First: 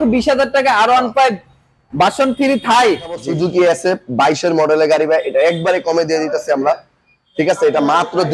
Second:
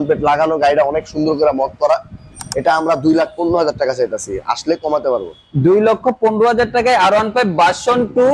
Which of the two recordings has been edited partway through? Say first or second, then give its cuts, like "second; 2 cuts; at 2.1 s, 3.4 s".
first; 1 cut; at 3.3 s